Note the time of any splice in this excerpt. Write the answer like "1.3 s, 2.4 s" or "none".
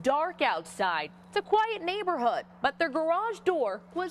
none